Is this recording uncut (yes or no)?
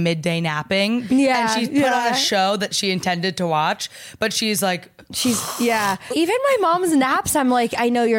no